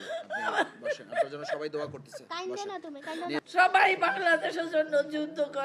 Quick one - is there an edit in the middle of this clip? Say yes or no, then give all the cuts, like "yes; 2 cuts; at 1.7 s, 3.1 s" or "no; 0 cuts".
yes; 1 cut; at 3.4 s